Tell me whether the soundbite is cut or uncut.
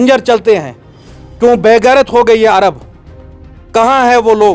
uncut